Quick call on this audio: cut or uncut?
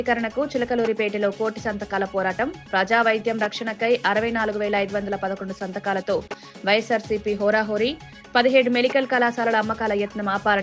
uncut